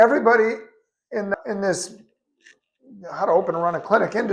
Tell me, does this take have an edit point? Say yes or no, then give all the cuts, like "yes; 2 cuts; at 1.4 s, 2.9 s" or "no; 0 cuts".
no; 0 cuts